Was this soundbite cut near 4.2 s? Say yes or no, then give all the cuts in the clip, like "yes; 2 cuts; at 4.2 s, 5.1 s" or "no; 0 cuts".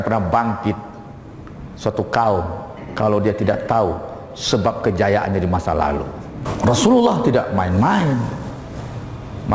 no; 1 cut; at 6.4 s